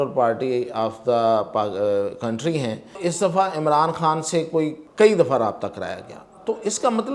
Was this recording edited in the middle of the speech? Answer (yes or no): yes